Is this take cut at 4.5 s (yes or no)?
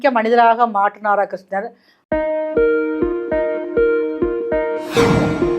no